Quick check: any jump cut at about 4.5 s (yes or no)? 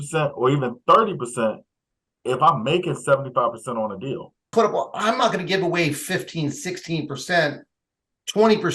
yes